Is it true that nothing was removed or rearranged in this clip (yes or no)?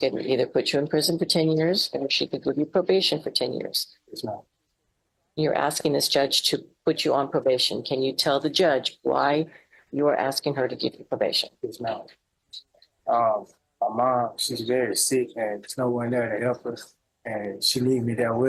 yes